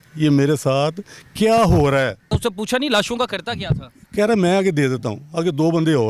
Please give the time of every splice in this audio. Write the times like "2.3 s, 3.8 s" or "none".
2.2 s